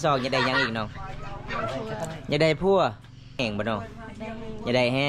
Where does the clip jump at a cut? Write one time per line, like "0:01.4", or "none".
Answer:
0:03.4